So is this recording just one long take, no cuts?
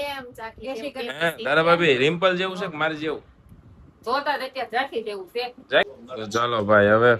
no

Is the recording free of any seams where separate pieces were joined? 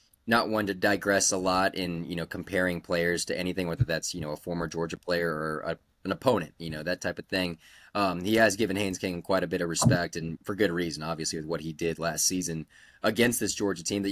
yes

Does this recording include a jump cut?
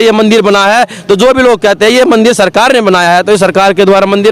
no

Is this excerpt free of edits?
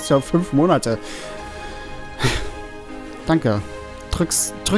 yes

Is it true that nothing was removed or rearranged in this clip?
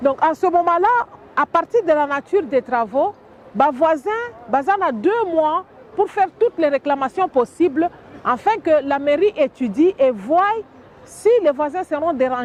yes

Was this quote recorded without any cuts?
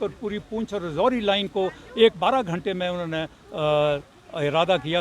yes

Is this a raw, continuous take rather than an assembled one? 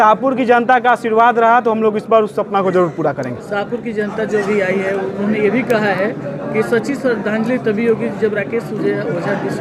yes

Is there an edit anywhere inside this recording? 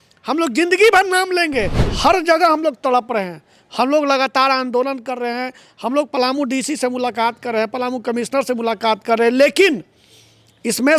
yes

